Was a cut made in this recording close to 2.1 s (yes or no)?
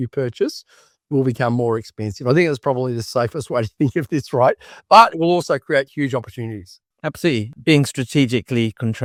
no